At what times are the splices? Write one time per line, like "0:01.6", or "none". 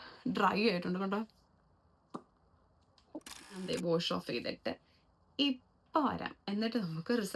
0:03.6